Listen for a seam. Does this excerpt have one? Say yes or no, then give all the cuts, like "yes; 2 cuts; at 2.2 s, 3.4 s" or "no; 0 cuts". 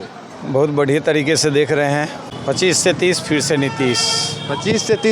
yes; 1 cut; at 2.3 s